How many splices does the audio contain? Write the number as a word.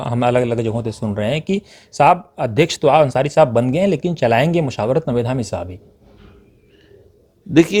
zero